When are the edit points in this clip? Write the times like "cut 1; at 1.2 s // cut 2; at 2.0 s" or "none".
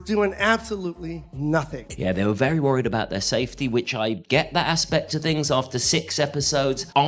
cut 1; at 1.7 s

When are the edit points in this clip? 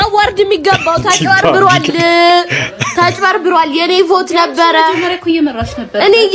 none

